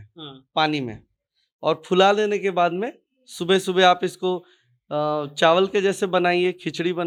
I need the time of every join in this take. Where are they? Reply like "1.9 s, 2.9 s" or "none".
none